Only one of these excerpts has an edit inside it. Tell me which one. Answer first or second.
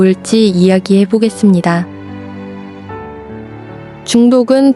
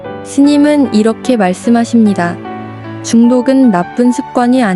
first